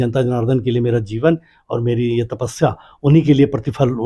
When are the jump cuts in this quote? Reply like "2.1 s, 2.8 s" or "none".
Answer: none